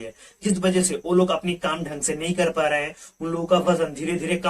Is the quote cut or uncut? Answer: uncut